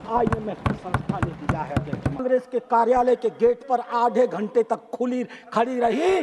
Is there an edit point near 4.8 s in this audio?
no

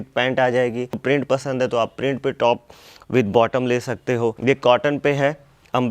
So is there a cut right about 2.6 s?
no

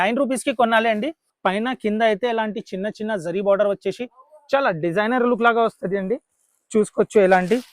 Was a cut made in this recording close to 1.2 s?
yes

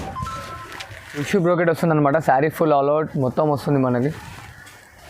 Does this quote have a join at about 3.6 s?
no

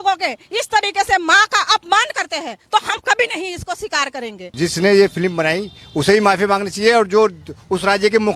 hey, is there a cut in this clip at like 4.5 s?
yes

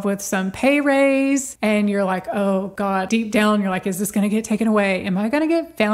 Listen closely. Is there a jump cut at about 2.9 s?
yes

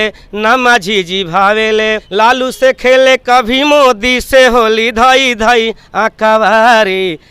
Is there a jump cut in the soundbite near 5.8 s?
no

